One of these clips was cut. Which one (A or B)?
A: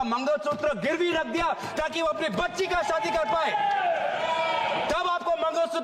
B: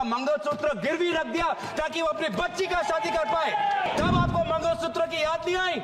B